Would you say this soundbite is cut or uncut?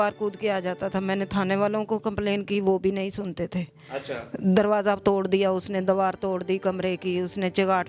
uncut